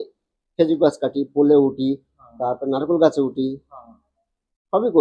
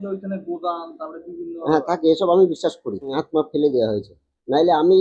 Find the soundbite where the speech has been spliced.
second; 1 cut; at 3.2 s

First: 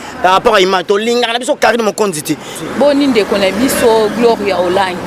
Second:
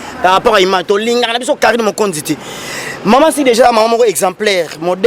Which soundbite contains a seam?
first; 1 cut; at 2.6 s

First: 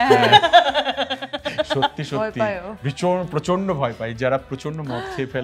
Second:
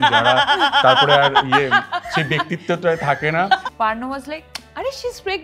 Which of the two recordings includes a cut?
second; 1 cut; at 3.7 s

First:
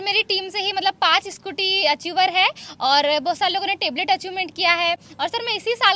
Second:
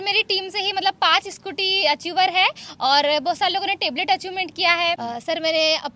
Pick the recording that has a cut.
second; 1 cut; at 5.0 s

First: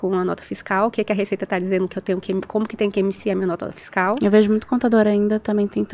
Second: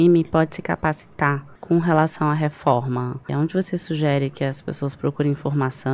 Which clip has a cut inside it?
second; 2 cuts; at 1.5 s, 3.3 s

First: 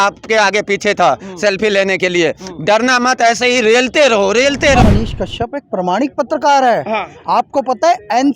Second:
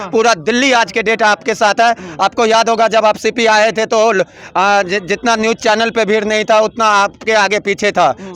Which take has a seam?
first; 1 cut; at 4.8 s

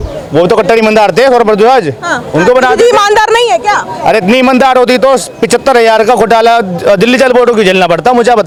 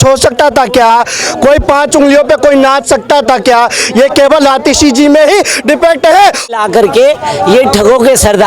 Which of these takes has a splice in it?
second; 1 cut; at 6.5 s

